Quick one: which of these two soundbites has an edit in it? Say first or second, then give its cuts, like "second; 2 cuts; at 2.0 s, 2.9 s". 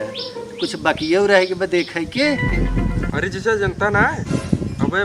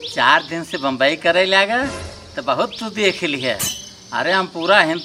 first; 1 cut; at 2.4 s